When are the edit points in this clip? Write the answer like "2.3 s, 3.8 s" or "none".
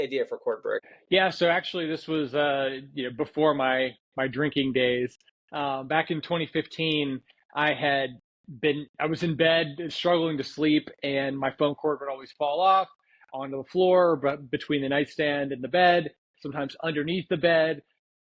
0.9 s